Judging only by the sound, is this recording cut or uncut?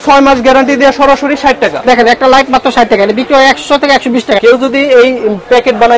cut